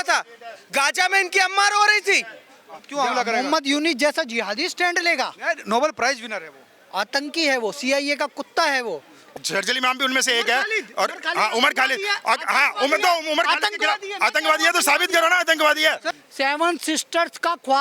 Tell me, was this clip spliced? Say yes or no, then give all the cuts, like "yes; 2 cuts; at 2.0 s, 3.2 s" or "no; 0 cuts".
yes; 3 cuts; at 2.8 s, 9.2 s, 16.1 s